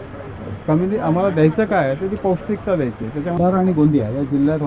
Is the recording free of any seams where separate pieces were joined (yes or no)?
no